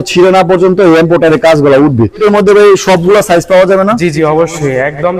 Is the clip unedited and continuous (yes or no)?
no